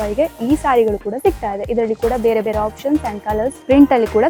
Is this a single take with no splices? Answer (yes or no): yes